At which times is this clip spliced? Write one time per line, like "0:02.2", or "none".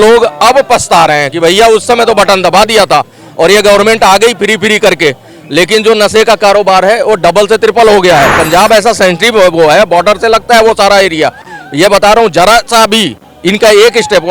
none